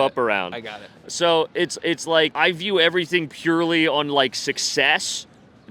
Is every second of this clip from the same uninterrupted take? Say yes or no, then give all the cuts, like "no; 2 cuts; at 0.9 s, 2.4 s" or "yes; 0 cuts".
no; 1 cut; at 2.3 s